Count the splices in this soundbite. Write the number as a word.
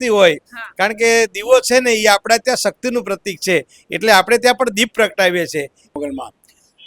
one